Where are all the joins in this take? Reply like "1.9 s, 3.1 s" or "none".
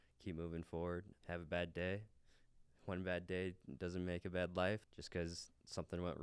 1.1 s, 4.9 s